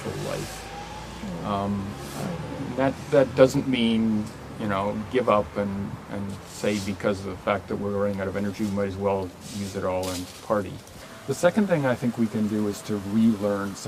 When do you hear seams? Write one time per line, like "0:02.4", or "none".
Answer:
0:11.1